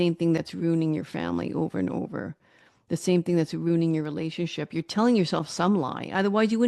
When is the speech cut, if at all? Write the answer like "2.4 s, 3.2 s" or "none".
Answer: none

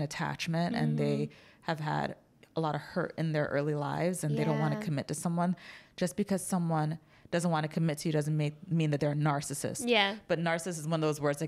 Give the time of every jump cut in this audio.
none

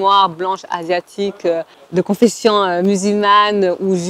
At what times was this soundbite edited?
1.8 s

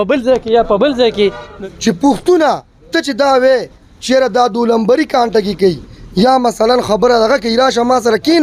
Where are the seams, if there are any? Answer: 1.5 s

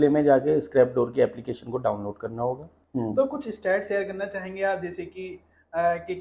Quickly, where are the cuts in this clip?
2.7 s

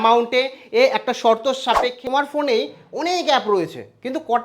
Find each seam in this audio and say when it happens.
2.0 s

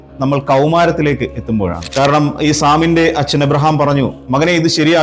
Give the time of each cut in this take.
1.8 s

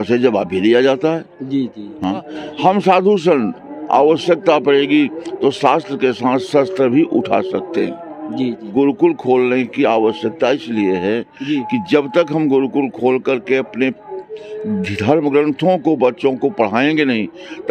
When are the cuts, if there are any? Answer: 2.3 s, 8.7 s

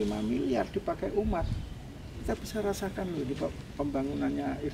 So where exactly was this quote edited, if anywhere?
none

